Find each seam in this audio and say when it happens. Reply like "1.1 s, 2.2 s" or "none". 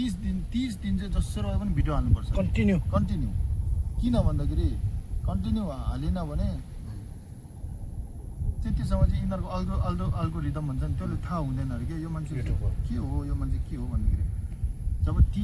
none